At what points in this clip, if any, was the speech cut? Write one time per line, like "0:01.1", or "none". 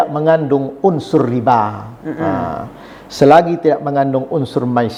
none